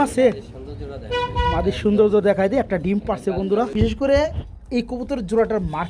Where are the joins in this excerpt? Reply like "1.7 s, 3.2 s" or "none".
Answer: 3.6 s